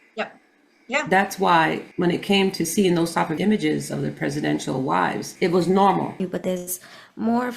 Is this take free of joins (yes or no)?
no